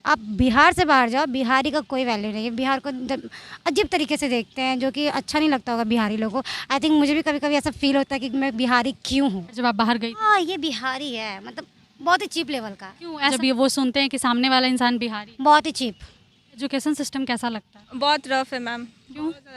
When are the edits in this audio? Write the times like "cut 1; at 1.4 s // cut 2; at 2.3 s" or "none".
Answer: cut 1; at 9.6 s // cut 2; at 13.3 s // cut 3; at 16.6 s